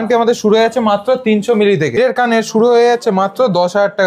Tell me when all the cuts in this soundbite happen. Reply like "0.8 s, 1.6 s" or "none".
2.0 s